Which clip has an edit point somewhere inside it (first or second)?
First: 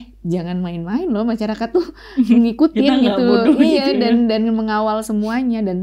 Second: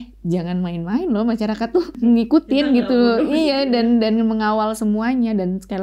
second